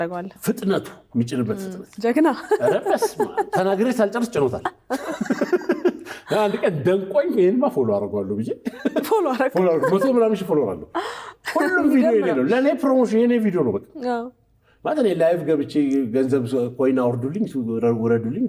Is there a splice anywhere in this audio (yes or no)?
no